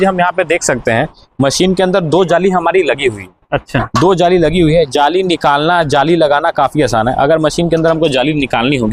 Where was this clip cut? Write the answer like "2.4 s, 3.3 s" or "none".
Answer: none

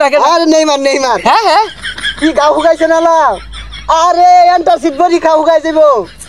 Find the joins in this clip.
none

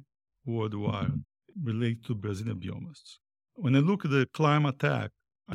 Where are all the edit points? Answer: 1.4 s, 2.2 s

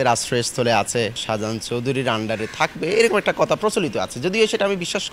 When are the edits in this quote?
none

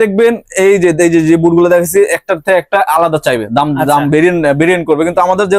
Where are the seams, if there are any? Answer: none

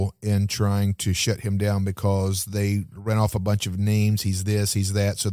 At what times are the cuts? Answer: none

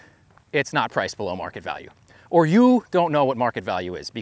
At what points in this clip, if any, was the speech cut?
none

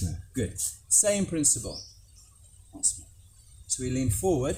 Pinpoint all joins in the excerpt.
none

